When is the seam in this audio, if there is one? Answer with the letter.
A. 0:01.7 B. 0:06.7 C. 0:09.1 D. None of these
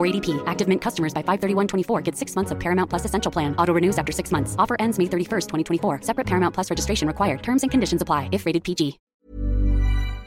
C